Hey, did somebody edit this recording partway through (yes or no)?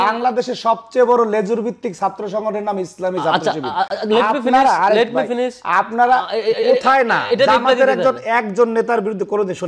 no